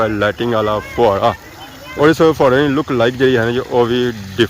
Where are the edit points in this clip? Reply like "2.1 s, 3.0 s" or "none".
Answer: 1.9 s